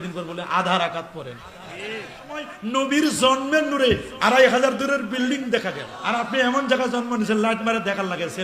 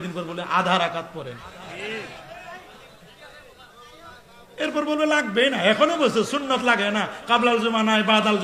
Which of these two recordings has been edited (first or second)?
first